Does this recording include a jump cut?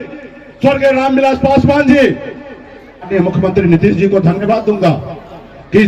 yes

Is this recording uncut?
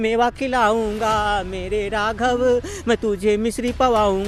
yes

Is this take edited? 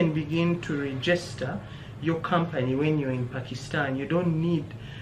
no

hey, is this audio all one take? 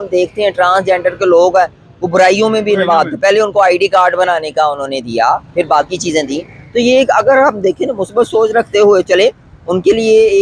yes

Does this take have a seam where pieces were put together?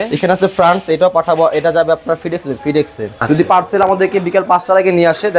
yes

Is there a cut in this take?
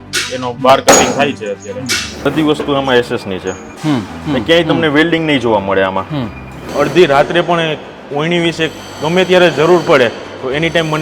yes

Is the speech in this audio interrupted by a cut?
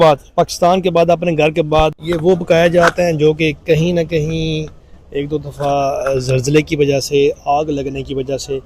yes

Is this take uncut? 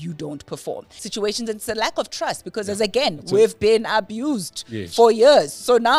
no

